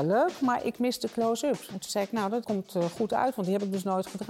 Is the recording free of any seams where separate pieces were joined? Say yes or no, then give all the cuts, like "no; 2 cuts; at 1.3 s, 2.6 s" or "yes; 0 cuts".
no; 1 cut; at 2.3 s